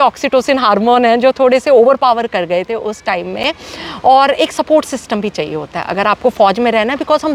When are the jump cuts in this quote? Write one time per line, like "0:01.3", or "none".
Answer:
none